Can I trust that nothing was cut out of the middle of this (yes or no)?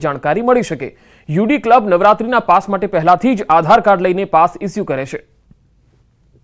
yes